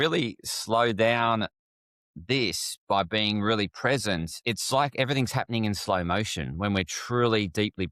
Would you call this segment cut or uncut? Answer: cut